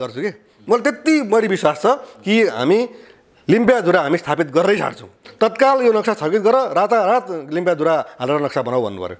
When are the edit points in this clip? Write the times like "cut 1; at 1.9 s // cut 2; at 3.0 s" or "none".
cut 1; at 5.2 s